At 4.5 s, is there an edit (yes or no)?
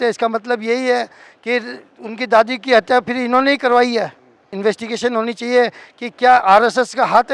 yes